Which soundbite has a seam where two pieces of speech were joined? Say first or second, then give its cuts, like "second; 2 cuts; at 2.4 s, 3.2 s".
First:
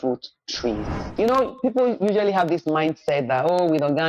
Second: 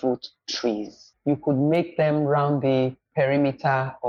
first; 1 cut; at 1.0 s